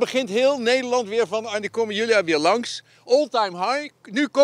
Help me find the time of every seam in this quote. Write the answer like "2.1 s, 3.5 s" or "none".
none